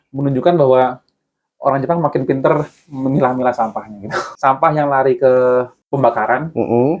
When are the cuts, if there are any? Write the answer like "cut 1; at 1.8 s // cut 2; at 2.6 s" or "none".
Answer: cut 1; at 4.2 s // cut 2; at 5.8 s